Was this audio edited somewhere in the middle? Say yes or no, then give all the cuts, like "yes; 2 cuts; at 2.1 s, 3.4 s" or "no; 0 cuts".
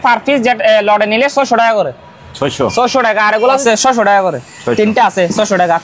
yes; 1 cut; at 3.6 s